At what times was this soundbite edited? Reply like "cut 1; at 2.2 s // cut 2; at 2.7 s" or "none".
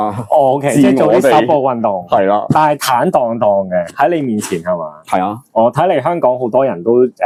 none